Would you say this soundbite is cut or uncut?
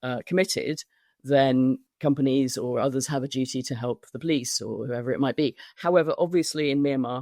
cut